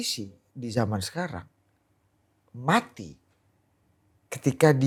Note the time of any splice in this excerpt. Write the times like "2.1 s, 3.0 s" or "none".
none